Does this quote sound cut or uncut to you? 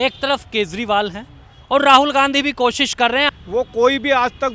cut